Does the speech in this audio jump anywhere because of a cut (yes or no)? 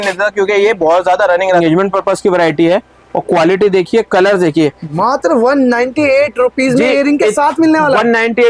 yes